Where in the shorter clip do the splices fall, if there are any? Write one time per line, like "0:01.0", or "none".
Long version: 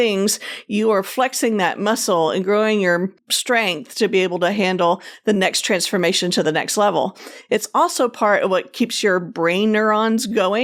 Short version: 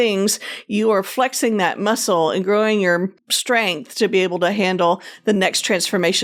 none